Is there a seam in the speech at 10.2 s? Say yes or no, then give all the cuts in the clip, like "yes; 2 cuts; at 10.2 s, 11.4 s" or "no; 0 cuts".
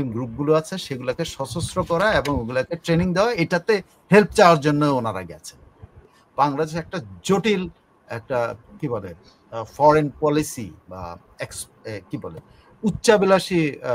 no; 1 cut; at 6.0 s